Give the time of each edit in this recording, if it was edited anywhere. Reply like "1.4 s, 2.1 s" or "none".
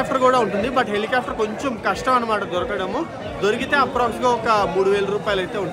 none